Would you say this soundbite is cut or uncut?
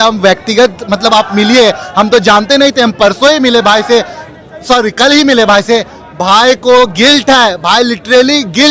uncut